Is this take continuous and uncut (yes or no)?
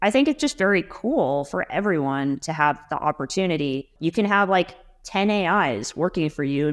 no